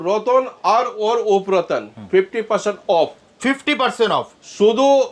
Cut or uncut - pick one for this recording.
uncut